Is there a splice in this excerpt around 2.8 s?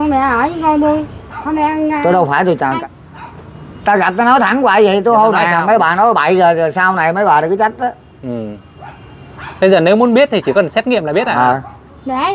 yes; 1 cut; at 2.8 s

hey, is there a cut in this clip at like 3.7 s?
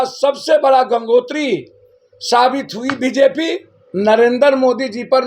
yes; 1 cut; at 3.7 s

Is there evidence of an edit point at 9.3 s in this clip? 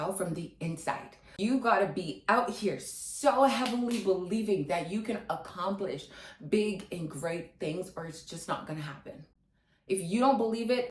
no; 0 cuts

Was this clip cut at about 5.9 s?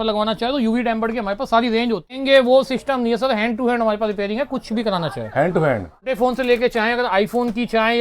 yes; 2 cuts; at 2.2 s, 5.9 s

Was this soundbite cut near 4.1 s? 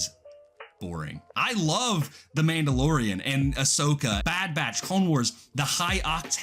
yes; 2 cuts; at 1.2 s, 4.1 s

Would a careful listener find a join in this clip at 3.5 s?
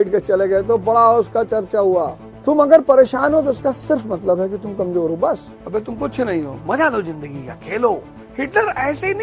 no; 3 cuts; at 2.2 s, 5.5 s, 8.2 s

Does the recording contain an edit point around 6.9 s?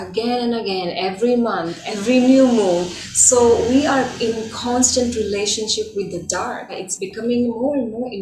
yes; 2 cuts; at 1.8 s, 6.9 s

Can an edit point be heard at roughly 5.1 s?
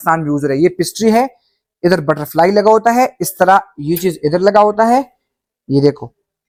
no; 0 cuts

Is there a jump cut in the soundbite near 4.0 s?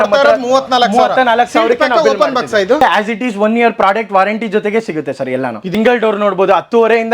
no; 2 cuts; at 2.8 s, 5.7 s

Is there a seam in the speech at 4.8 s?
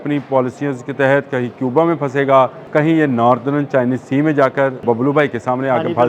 yes; 2 cuts; at 2.6 s, 4.8 s

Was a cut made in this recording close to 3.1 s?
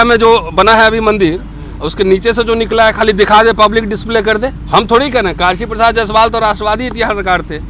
no; 1 cut; at 4.6 s

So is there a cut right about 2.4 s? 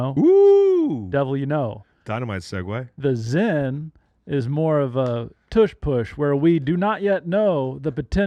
no; 0 cuts

